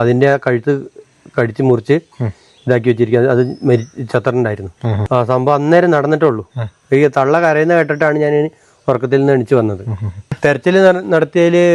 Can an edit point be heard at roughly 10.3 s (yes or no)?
yes